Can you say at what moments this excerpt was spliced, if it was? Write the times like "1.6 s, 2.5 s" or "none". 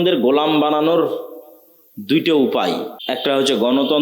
3.0 s